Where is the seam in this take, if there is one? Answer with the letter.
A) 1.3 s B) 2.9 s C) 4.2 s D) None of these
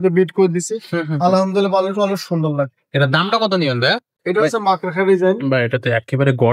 C